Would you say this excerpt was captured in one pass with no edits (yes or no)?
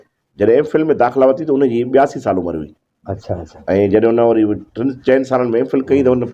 yes